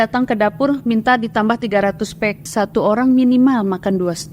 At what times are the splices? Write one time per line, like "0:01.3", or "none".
0:02.5